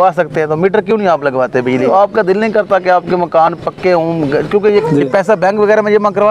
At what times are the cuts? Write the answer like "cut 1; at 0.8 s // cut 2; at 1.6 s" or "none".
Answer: cut 1; at 1.8 s // cut 2; at 4.8 s